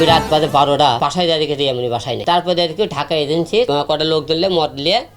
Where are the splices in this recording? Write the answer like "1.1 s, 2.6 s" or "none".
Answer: 1.0 s, 2.2 s, 3.7 s